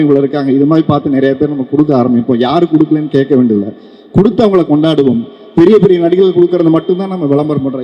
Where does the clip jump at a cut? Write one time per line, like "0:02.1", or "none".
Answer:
none